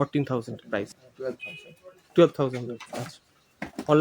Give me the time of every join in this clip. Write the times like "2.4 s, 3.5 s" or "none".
1.0 s